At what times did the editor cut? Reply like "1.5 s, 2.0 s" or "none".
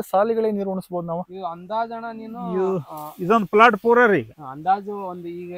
none

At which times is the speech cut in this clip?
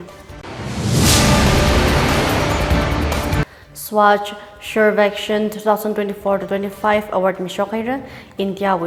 none

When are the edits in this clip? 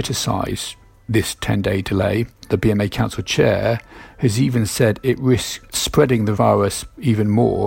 2.4 s, 6.1 s

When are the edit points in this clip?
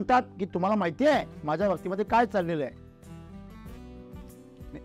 none

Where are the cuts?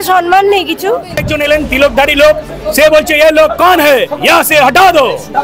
1.3 s

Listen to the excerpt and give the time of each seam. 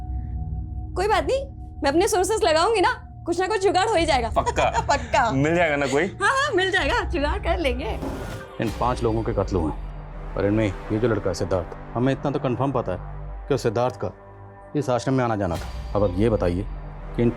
8.1 s

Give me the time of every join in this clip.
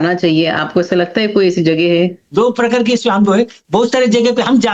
2.2 s

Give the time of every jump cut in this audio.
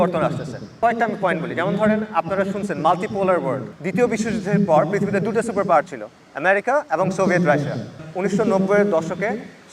0.8 s, 3.7 s, 8.1 s

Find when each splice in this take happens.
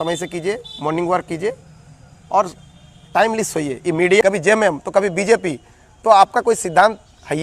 4.2 s

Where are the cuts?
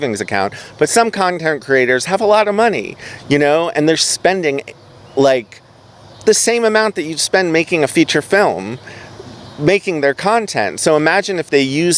none

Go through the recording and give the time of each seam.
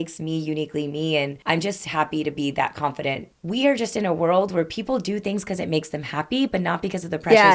1.4 s, 3.3 s

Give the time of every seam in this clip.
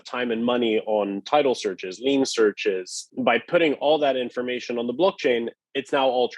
3.0 s

